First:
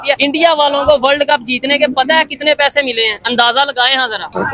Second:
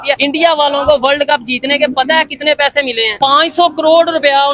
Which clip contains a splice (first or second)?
second